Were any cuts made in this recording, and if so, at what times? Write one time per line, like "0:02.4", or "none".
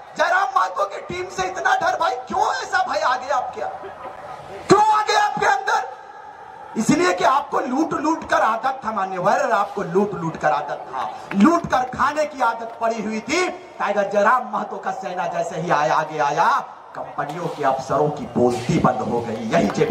none